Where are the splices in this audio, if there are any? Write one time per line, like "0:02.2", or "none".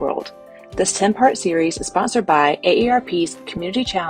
none